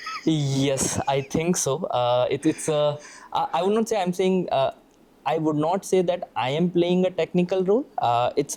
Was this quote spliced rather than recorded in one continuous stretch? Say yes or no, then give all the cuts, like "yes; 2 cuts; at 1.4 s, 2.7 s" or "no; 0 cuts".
no; 0 cuts